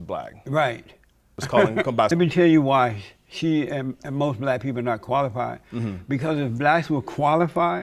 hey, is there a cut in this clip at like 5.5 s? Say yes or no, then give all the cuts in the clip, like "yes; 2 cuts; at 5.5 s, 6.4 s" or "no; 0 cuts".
no; 2 cuts; at 1.4 s, 2.1 s